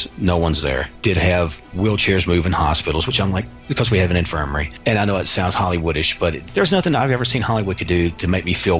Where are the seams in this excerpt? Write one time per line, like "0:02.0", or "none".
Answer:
0:00.9
0:01.7
0:04.6
0:06.4